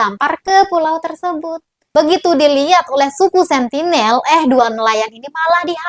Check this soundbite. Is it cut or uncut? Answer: uncut